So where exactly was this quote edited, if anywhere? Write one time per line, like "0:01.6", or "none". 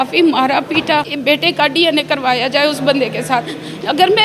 0:01.1